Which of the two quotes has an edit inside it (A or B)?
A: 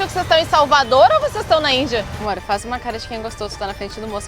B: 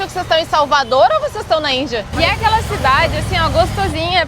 A